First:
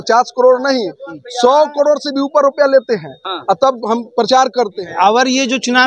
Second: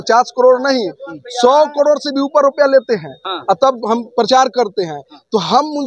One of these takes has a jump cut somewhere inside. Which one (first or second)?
first